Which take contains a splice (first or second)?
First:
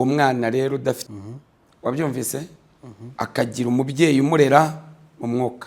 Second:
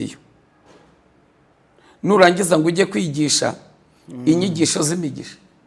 first